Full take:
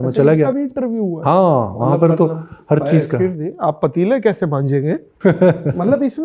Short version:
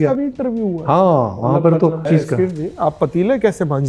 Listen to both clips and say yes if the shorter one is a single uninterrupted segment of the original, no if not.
no